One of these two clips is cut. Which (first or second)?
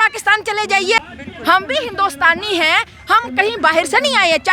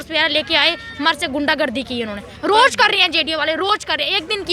first